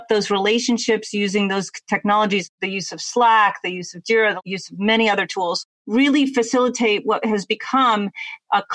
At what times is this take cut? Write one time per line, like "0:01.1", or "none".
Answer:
0:02.4
0:04.4
0:05.6